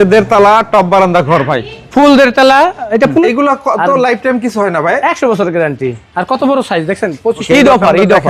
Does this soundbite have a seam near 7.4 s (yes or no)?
yes